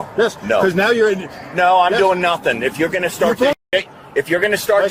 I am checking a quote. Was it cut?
no; 0 cuts

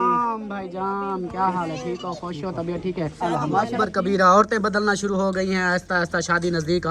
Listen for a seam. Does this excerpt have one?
yes; 1 cut; at 3.8 s

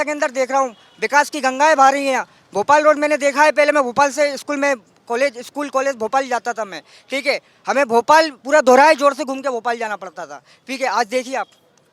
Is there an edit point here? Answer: no; 0 cuts

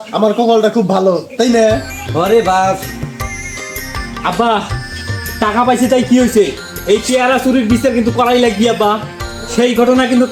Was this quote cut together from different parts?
no; 0 cuts

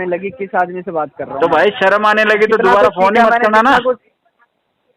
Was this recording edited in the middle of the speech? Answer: no; 0 cuts

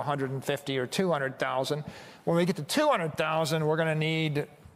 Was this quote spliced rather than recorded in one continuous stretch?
no; 0 cuts

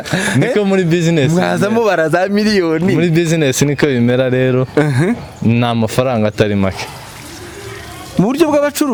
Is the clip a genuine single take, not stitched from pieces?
yes; 0 cuts

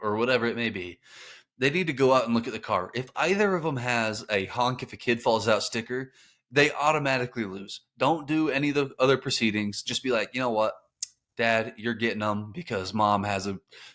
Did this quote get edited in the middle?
no; 0 cuts

